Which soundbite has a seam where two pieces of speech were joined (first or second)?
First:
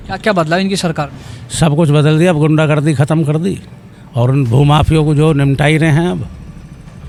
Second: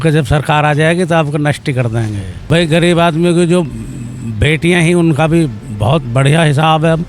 second